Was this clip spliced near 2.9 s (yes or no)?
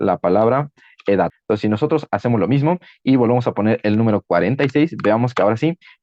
no